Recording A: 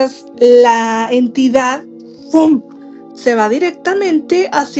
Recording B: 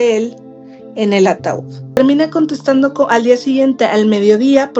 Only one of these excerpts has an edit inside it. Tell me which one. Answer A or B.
B